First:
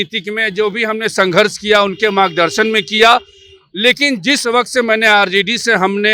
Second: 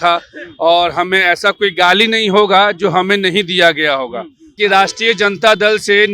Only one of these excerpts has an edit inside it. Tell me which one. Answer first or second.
second